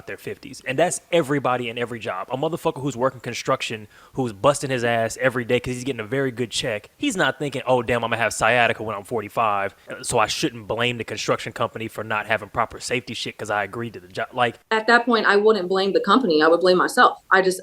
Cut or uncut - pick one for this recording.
cut